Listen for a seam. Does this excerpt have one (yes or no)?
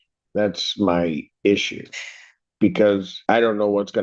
yes